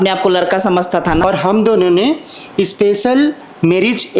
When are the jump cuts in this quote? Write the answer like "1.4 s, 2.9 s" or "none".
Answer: 1.2 s